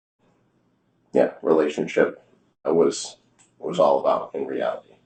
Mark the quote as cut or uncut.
uncut